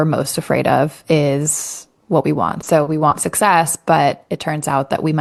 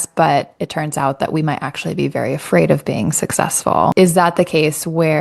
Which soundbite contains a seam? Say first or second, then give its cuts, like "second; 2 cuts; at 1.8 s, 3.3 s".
second; 1 cut; at 3.9 s